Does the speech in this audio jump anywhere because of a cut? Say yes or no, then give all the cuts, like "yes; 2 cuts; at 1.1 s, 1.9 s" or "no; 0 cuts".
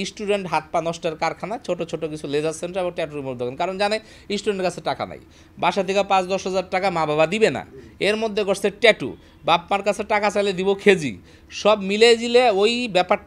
no; 0 cuts